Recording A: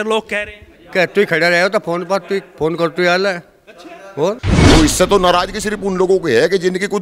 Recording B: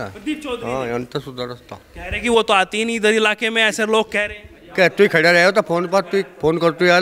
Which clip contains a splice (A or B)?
A